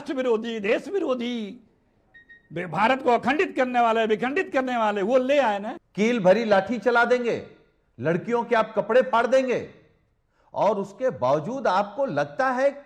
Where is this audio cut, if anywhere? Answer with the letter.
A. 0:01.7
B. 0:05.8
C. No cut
B